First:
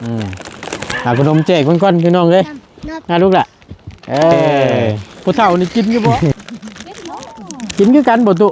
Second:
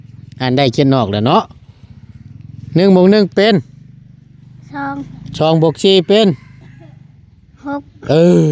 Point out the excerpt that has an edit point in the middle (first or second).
first